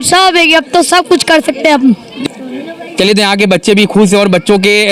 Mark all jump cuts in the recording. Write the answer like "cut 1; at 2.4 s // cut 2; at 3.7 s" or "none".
none